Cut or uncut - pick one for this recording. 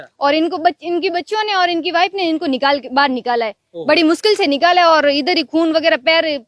uncut